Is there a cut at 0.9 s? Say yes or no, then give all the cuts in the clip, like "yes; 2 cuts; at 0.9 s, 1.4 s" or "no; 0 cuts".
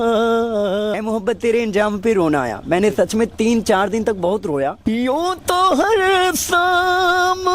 yes; 2 cuts; at 0.9 s, 4.8 s